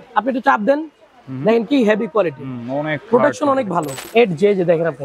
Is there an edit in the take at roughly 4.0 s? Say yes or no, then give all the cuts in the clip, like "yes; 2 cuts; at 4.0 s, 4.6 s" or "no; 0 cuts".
yes; 1 cut; at 4.0 s